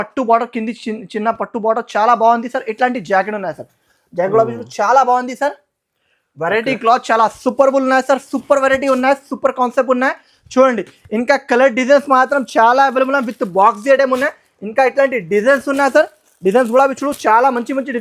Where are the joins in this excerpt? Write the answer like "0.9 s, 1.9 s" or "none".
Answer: none